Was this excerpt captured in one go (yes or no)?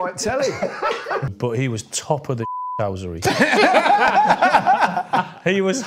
no